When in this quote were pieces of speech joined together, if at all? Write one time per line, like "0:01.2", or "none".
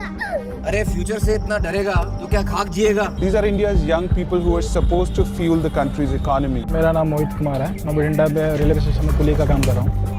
none